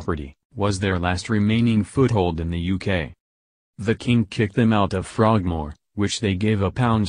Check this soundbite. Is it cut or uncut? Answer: cut